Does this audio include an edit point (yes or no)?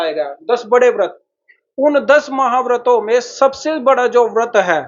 no